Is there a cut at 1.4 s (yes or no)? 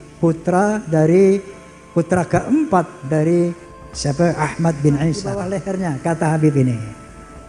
no